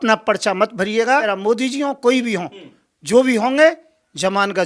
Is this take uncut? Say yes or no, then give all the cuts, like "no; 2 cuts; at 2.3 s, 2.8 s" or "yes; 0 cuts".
no; 1 cut; at 1.3 s